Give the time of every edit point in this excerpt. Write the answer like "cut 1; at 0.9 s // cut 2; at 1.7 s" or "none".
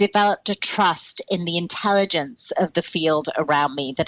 none

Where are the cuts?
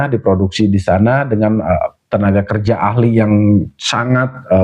none

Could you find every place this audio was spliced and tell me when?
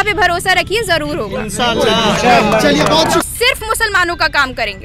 cut 1; at 3.3 s

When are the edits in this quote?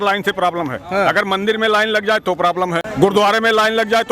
cut 1; at 2.9 s

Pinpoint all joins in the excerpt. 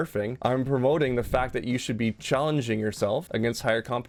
none

